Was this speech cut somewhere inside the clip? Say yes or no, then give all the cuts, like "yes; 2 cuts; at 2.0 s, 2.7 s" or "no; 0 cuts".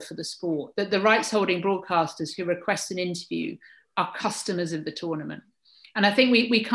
no; 0 cuts